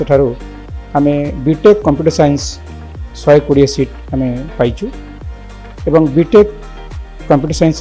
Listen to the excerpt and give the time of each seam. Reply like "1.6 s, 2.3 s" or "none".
none